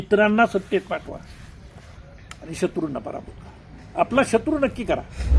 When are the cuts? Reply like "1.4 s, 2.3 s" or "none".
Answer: none